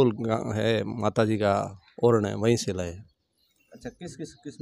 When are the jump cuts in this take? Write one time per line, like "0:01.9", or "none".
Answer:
none